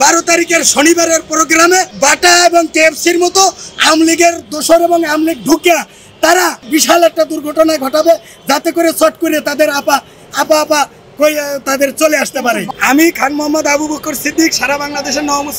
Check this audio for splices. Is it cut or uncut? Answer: cut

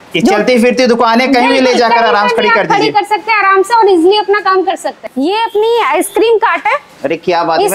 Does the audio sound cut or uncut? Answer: cut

